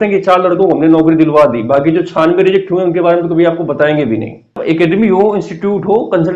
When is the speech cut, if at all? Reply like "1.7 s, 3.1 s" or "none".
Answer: 4.6 s